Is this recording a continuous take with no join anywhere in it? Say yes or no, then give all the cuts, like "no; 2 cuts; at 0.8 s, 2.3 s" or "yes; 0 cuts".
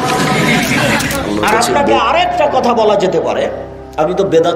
no; 1 cut; at 1.4 s